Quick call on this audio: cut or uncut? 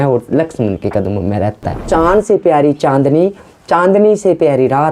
cut